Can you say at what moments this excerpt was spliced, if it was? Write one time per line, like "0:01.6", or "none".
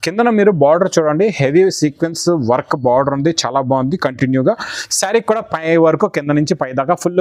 none